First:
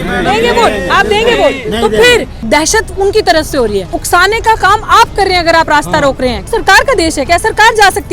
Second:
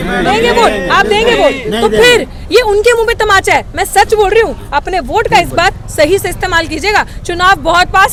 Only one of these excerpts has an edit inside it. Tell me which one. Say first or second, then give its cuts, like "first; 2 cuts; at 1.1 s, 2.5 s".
first; 3 cuts; at 2.3 s, 4.0 s, 6.5 s